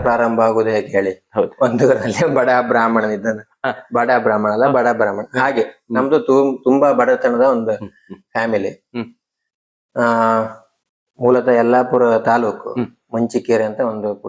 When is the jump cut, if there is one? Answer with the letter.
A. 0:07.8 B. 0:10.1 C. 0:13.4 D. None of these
D